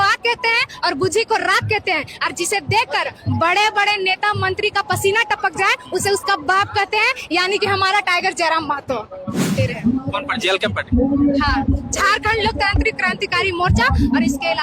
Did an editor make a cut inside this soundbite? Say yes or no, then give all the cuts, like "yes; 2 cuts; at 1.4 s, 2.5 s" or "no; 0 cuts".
yes; 1 cut; at 9.6 s